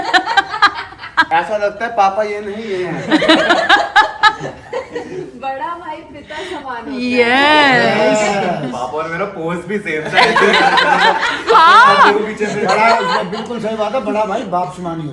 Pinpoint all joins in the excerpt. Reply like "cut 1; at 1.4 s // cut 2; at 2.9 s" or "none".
cut 1; at 1.3 s

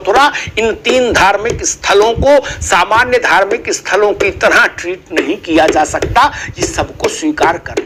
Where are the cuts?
none

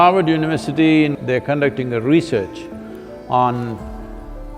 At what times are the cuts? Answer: cut 1; at 1.2 s

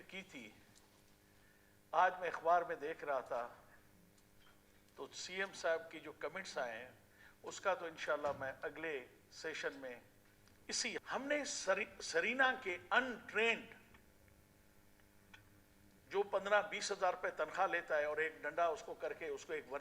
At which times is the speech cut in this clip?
cut 1; at 11.0 s

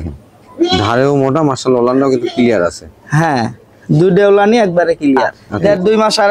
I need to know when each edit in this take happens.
cut 1; at 5.4 s

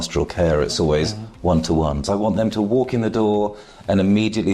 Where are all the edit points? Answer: cut 1; at 2.0 s

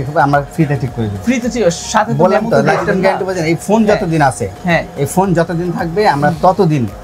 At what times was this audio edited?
none

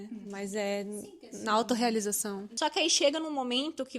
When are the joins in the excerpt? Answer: cut 1; at 2.5 s

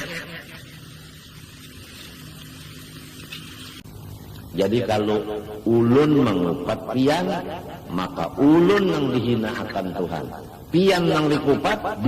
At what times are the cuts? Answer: cut 1; at 3.8 s

